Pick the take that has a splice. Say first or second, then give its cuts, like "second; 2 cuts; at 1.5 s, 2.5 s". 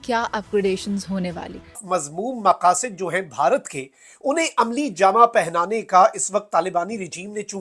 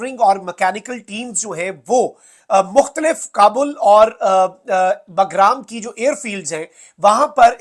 first; 1 cut; at 1.8 s